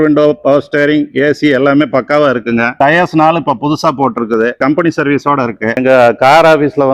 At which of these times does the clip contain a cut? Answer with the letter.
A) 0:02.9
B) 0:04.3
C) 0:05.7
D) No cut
C